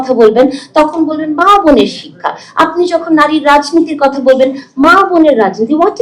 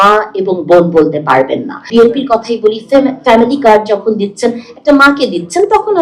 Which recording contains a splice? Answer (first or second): second